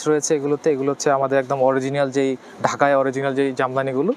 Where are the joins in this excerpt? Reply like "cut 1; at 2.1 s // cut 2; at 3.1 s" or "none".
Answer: none